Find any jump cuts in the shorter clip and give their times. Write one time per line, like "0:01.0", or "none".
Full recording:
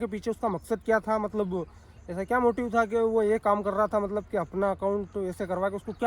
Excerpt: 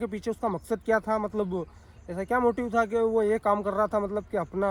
none